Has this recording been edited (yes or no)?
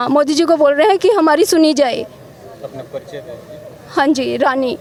no